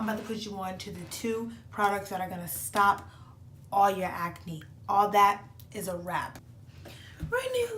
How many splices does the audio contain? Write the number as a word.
one